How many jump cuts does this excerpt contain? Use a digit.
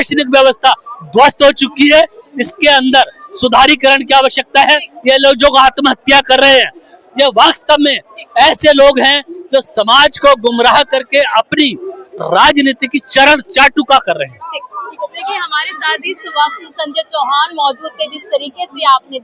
0